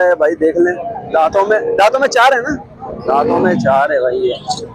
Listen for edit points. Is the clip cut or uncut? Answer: uncut